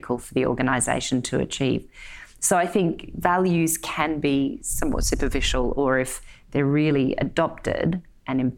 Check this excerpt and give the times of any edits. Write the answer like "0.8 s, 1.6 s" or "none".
none